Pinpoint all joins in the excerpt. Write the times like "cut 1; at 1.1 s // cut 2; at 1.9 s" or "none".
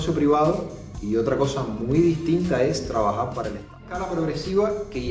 cut 1; at 3.9 s